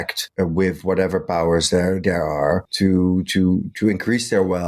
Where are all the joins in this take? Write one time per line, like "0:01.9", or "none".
none